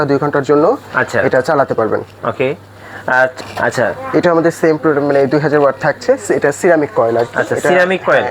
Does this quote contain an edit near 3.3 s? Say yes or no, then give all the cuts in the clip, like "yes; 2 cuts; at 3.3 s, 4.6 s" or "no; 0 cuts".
yes; 1 cut; at 3.3 s